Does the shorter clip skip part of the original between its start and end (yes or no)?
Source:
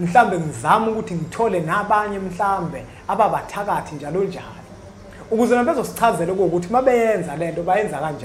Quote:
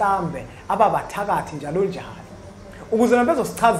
no